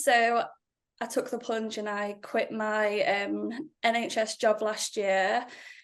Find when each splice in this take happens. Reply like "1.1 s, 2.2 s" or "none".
none